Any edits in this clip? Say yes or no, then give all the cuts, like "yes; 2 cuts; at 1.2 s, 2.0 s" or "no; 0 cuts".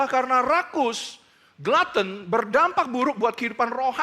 no; 0 cuts